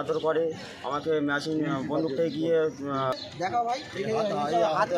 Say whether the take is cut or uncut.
cut